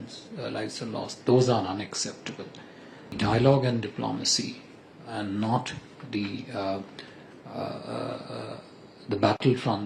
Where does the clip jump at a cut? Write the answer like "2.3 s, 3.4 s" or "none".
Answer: 3.1 s